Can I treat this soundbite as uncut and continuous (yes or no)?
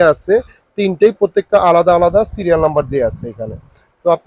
yes